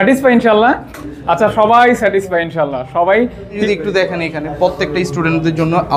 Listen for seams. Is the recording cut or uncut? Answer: cut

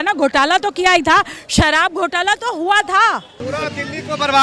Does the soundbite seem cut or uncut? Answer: cut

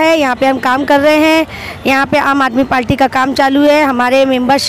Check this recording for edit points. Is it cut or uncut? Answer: uncut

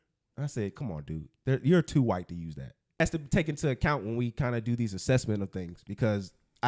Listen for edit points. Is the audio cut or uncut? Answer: cut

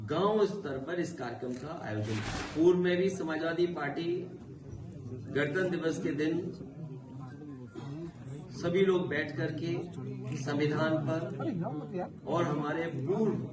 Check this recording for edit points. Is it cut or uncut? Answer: cut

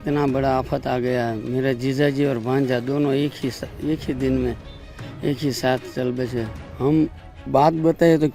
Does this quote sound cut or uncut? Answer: uncut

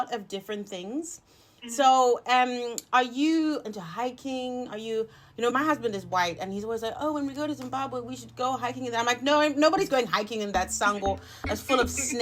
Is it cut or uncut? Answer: cut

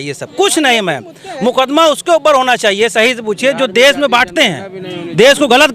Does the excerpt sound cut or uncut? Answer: uncut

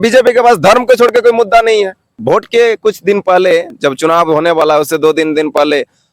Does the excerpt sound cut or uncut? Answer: cut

